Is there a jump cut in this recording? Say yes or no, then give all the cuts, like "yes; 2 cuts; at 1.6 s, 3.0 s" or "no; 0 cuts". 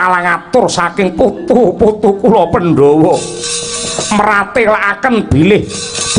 no; 0 cuts